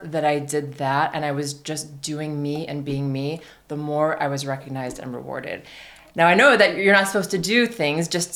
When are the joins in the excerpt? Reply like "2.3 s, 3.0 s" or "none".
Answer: none